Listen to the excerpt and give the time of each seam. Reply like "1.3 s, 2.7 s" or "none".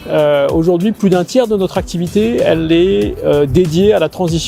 none